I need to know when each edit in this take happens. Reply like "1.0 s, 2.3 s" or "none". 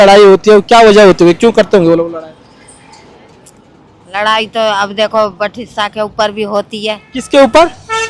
none